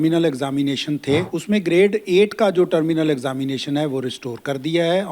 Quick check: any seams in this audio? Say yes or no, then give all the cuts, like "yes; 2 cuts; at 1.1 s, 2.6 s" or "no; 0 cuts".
yes; 1 cut; at 1.3 s